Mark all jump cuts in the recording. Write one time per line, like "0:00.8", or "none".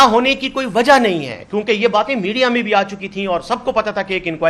none